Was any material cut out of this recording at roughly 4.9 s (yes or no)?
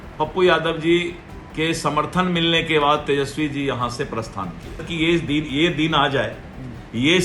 yes